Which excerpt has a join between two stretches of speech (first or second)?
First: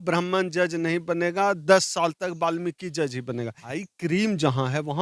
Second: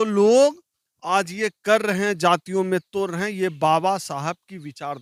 first